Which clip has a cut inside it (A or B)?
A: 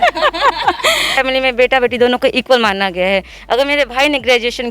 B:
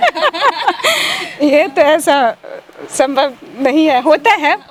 A